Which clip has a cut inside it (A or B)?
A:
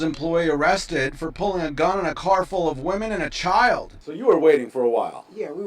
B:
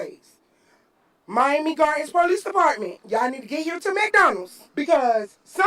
A